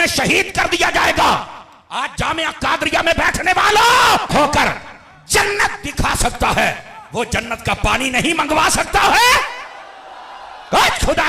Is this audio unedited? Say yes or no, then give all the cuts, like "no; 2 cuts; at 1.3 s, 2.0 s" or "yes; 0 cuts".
no; 1 cut; at 4.3 s